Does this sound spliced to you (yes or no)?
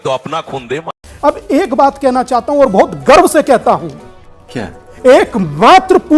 yes